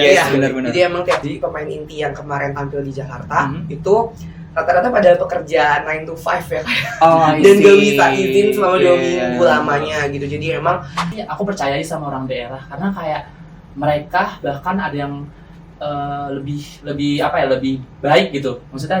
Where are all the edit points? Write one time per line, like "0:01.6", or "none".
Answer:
0:01.2
0:11.1